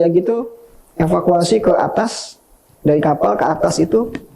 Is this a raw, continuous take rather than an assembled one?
yes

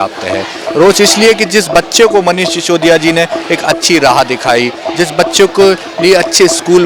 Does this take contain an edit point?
no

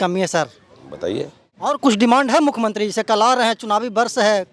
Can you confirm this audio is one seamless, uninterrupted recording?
no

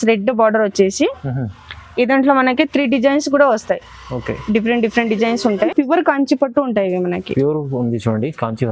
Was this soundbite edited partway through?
yes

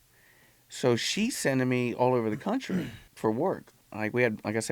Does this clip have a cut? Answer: yes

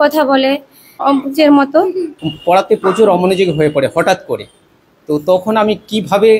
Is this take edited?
yes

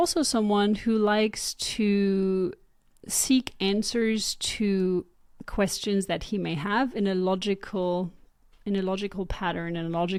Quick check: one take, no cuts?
yes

